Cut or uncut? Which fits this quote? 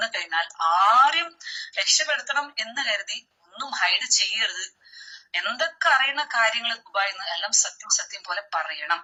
uncut